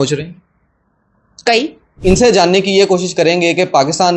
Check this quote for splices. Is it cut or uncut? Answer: cut